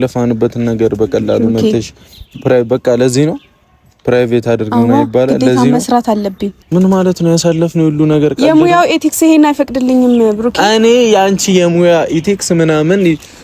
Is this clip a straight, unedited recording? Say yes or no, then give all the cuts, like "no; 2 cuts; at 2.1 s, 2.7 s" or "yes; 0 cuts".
no; 1 cut; at 6.5 s